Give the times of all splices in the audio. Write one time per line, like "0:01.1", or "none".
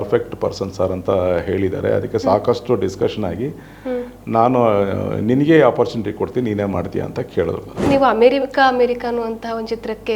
0:07.9